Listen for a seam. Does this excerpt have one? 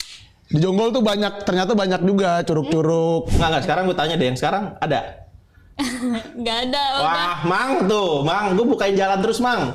yes; 1 cut; at 3.3 s

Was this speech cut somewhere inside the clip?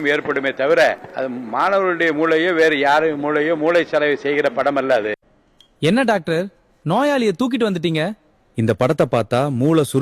yes; 1 cut; at 0.9 s

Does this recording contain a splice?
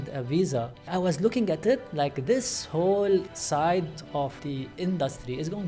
yes; 3 cuts; at 0.9 s, 3.3 s, 4.4 s

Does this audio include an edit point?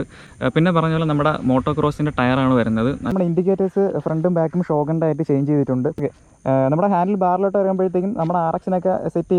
yes; 2 cuts; at 3.1 s, 6.0 s

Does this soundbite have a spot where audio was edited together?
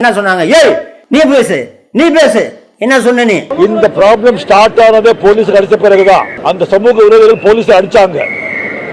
no; 0 cuts

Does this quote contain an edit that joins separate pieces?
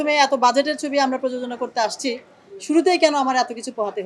no; 0 cuts

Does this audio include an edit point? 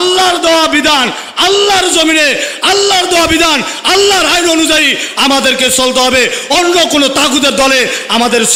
no; 0 cuts

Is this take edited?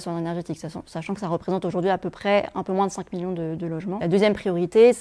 no; 0 cuts

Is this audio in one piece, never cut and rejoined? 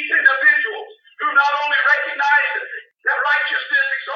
yes; 0 cuts

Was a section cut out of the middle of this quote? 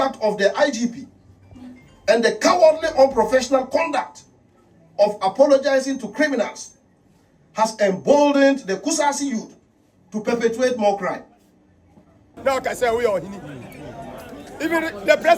yes; 1 cut; at 12.3 s

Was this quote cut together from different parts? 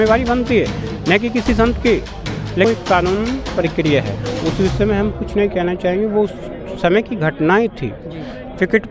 yes; 1 cut; at 2.7 s

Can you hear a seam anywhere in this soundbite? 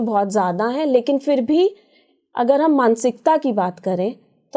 no; 0 cuts

